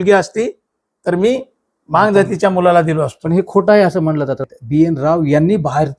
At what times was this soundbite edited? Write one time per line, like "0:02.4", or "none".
0:04.4